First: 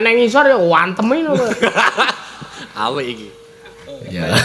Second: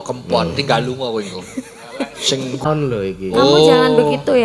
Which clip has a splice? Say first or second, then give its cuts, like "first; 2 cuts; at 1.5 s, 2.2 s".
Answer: second; 1 cut; at 2.6 s